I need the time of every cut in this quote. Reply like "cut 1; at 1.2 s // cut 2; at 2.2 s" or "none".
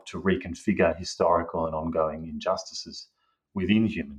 none